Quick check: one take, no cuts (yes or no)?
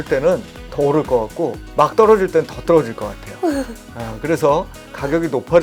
yes